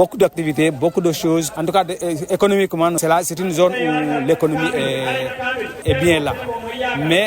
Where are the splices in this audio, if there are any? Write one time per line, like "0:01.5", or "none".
0:01.5
0:03.0
0:05.8